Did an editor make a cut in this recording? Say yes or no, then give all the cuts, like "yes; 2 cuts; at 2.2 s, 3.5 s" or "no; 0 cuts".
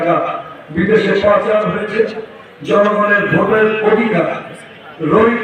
no; 0 cuts